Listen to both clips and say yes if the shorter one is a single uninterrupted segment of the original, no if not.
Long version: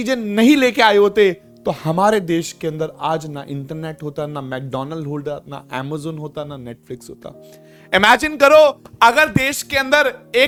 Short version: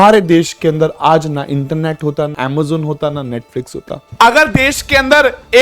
no